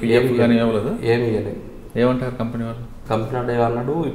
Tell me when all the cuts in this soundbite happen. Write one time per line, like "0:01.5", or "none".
none